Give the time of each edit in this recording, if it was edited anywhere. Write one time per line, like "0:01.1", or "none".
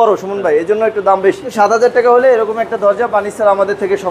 0:01.5